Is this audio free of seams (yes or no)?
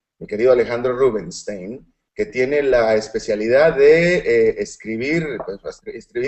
yes